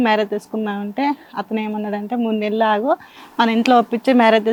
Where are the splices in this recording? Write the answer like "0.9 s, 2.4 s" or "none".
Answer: none